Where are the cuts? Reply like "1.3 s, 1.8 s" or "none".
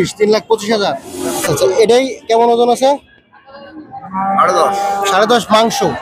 1.1 s